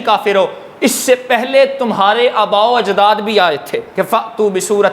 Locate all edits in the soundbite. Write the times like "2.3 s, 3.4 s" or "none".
3.8 s